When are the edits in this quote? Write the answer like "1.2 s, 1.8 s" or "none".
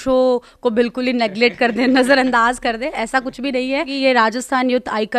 3.9 s